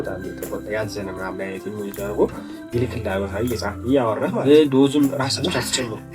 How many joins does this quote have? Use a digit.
1